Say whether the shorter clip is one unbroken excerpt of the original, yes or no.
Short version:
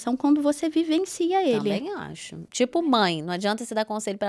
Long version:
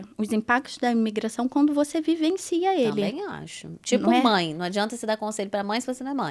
yes